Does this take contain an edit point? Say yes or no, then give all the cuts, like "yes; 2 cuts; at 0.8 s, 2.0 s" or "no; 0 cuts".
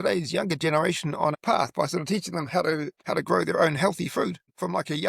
yes; 1 cut; at 1.3 s